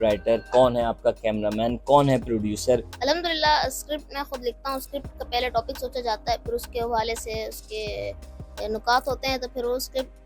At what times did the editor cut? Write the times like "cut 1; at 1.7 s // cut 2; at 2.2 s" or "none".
cut 1; at 2.9 s